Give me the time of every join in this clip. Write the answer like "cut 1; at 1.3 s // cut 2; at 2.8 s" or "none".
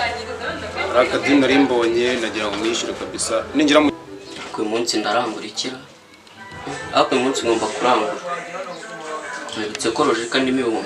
cut 1; at 3.9 s

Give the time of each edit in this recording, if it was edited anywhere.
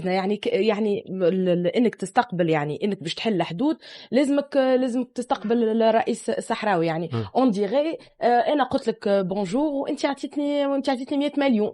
none

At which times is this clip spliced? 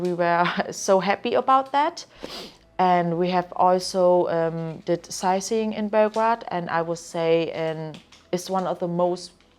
none

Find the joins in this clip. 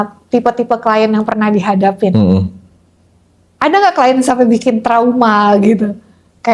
none

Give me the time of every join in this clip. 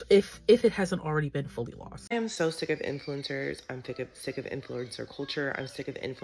cut 1; at 2.0 s

